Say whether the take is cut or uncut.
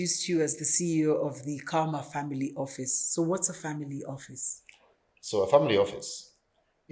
uncut